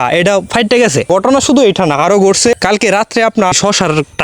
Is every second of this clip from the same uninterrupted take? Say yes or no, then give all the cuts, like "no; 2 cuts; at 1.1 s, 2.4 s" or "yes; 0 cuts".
no; 3 cuts; at 1.1 s, 2.5 s, 3.5 s